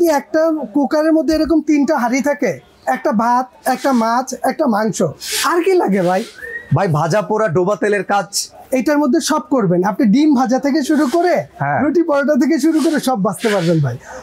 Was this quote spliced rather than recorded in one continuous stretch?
no; 0 cuts

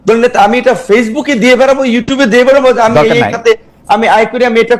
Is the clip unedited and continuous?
yes; 0 cuts

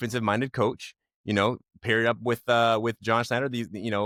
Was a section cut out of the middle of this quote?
no; 0 cuts

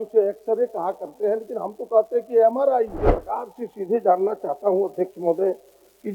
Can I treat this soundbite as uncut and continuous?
no; 1 cut; at 3.1 s

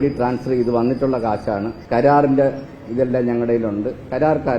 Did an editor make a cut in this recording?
yes; 1 cut; at 1.8 s

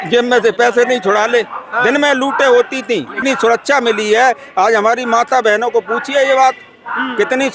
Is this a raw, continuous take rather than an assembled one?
no; 1 cut; at 3.2 s

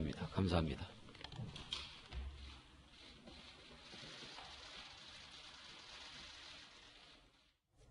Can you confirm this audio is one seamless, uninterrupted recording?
yes; 0 cuts

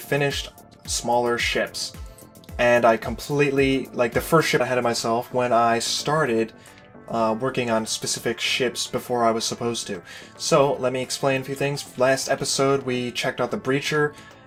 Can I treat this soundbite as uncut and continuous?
yes; 0 cuts

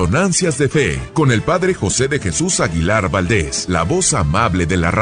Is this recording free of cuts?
no; 2 cuts; at 1.0 s, 3.6 s

